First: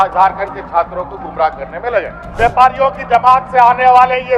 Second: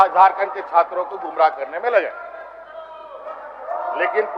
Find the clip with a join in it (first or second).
first